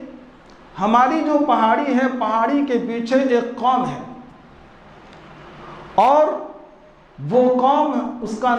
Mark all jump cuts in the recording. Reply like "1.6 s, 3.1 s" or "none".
none